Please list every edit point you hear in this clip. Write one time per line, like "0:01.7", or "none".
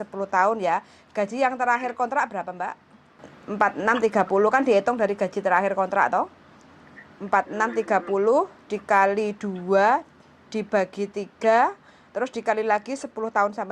0:03.3